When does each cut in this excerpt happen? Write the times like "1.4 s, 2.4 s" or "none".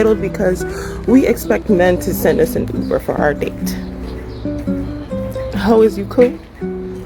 none